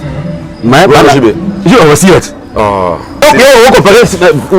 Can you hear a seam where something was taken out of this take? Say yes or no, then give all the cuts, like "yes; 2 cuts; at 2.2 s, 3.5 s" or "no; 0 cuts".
yes; 1 cut; at 3.2 s